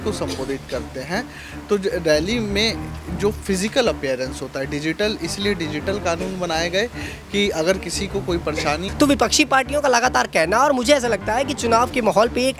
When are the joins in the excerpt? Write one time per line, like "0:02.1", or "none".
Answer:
0:08.9